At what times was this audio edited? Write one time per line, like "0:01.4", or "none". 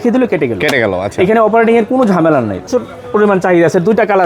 0:02.7